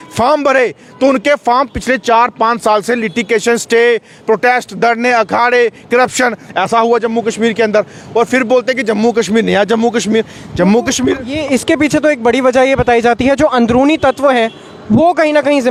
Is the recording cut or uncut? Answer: uncut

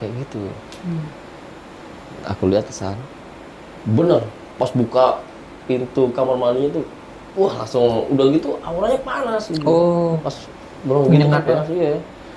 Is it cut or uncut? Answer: cut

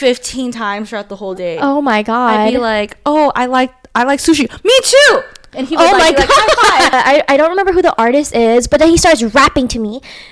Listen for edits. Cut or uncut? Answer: cut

